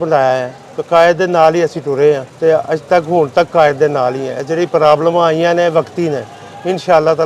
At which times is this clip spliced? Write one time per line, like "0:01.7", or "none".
0:02.3